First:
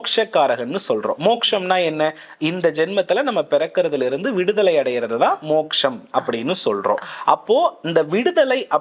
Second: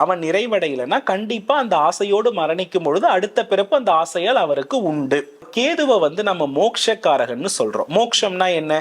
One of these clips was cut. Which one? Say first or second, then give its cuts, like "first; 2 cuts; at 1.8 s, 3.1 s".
second; 1 cut; at 5.5 s